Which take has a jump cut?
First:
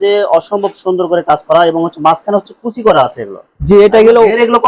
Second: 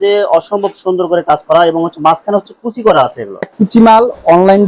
second; 1 cut; at 3.5 s

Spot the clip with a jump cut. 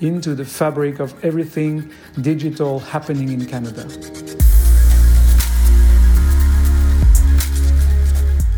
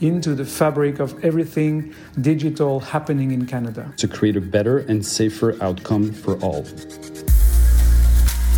second; 2 cuts; at 3.9 s, 6.7 s

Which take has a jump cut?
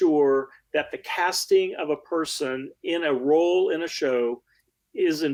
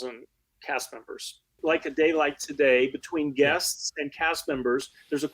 second; 1 cut; at 1.6 s

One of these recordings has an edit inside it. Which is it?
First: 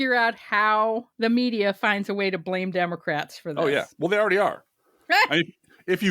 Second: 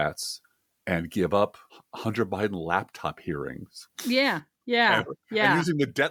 first; 1 cut; at 1.1 s

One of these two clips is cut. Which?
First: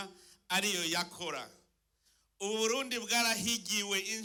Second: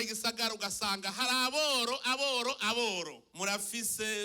second; 1 cut; at 3.2 s

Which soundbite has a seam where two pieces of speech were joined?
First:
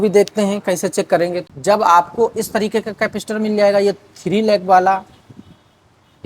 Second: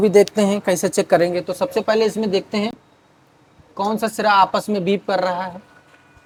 first; 1 cut; at 1.5 s

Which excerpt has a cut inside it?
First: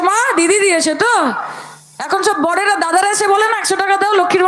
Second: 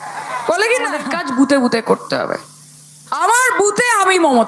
second; 1 cut; at 1.0 s

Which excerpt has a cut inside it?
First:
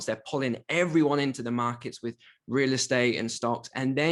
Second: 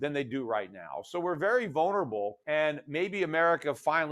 second; 1 cut; at 2.4 s

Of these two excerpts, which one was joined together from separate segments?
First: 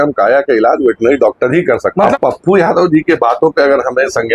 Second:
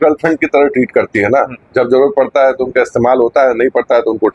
first; 1 cut; at 2.1 s

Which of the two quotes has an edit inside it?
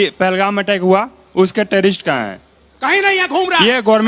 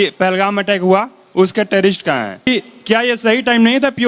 second; 1 cut; at 2.5 s

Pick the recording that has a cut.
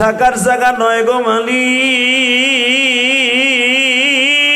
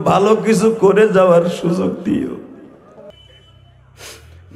second; 1 cut; at 3.1 s

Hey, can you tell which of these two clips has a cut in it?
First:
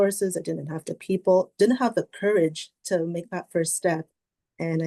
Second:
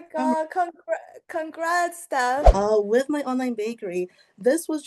second; 1 cut; at 2.5 s

